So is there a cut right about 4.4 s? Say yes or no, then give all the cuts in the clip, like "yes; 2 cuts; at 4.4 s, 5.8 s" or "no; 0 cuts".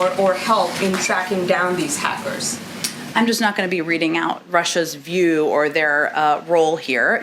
no; 0 cuts